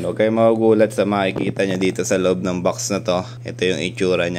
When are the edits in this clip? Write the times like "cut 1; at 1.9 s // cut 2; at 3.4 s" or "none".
cut 1; at 3.4 s